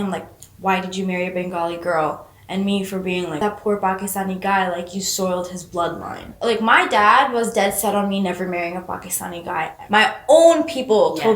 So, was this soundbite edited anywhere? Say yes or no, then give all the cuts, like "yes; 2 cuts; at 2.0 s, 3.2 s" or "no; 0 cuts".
yes; 3 cuts; at 3.4 s, 6.3 s, 9.7 s